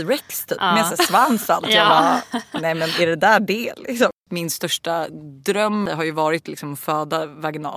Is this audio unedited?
no; 2 cuts; at 4.2 s, 5.8 s

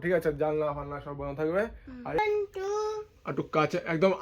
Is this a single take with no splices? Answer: no; 1 cut; at 2.2 s

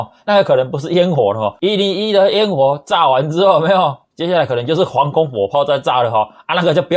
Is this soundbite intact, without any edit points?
no; 1 cut; at 1.5 s

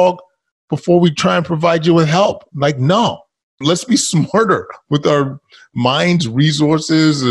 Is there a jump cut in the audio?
yes; 1 cut; at 3.5 s

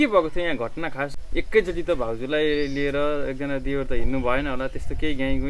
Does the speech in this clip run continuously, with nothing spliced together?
no; 1 cut; at 1.2 s

